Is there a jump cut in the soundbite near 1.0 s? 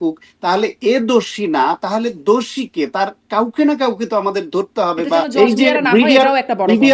no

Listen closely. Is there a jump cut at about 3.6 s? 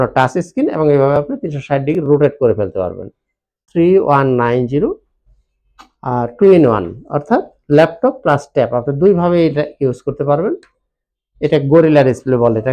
yes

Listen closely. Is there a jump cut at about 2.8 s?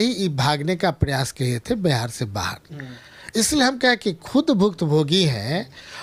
no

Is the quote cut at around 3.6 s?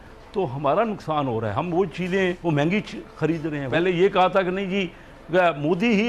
yes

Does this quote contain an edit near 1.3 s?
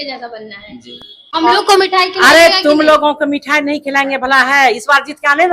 yes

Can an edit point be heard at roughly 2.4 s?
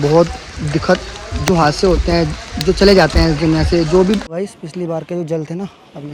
no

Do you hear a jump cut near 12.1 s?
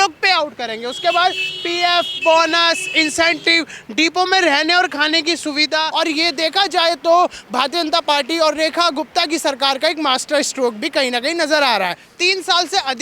yes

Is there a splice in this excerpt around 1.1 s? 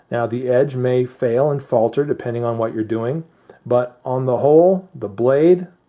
yes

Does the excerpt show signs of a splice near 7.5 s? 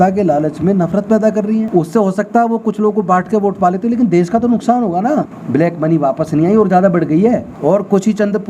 yes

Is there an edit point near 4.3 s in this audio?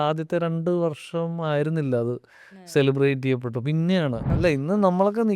yes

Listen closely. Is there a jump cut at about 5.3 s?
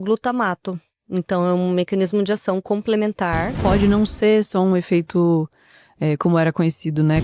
no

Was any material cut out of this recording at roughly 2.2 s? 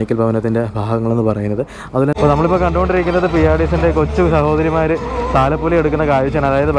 yes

